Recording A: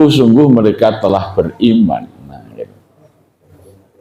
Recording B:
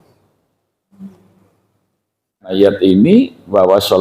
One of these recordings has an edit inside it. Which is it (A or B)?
B